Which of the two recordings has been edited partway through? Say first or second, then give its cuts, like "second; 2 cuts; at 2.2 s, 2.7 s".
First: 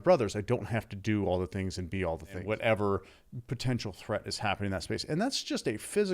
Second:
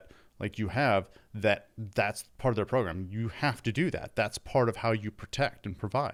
first; 1 cut; at 2.4 s